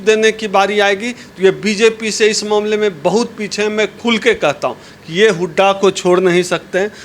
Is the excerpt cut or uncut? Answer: cut